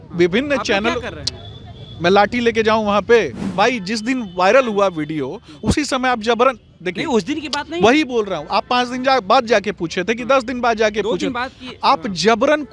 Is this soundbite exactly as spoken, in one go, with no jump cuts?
no; 1 cut; at 3.5 s

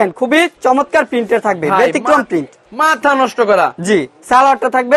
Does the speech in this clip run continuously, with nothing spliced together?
yes; 0 cuts

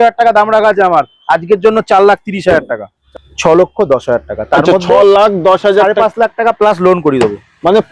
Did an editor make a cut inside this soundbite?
yes; 1 cut; at 3.0 s

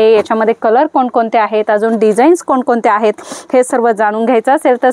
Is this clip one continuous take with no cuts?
yes; 0 cuts

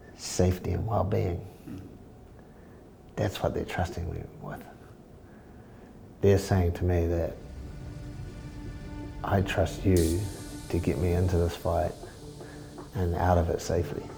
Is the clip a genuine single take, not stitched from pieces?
yes; 0 cuts

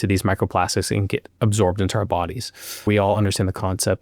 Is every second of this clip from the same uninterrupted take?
no; 1 cut; at 2.8 s

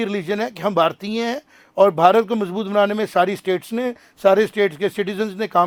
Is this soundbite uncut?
yes; 0 cuts

